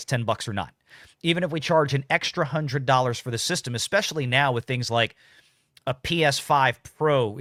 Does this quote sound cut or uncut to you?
uncut